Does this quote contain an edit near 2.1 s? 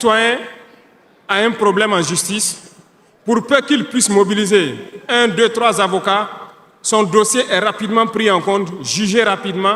no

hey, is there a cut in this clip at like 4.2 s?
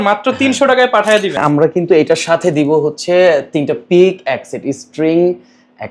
no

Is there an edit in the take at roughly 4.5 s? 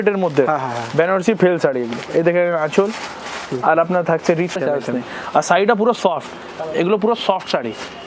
yes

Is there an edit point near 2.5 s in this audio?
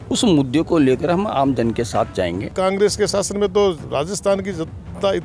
yes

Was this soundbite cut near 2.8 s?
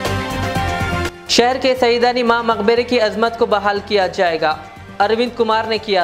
no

